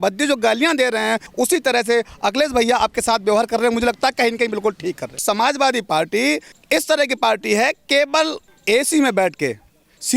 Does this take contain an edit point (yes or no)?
yes